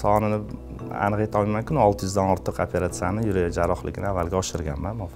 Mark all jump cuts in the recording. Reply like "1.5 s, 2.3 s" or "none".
none